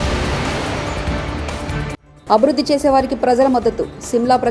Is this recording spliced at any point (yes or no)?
yes